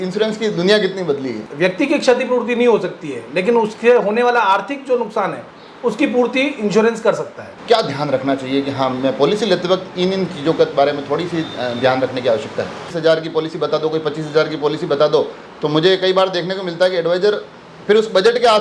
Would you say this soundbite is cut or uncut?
cut